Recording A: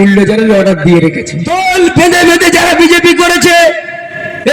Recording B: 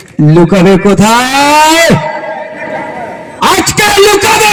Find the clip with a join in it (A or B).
A